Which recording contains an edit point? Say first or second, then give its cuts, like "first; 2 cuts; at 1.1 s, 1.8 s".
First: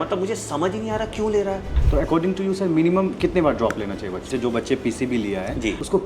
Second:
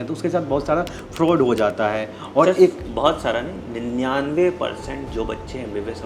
first; 2 cuts; at 1.8 s, 4.2 s